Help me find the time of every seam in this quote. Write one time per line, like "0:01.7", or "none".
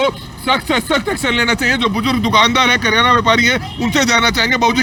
none